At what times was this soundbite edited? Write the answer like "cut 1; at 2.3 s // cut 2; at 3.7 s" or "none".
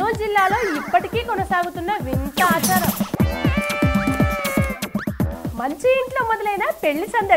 cut 1; at 3.1 s